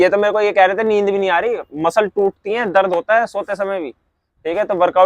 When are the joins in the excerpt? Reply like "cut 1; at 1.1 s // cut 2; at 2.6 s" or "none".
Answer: none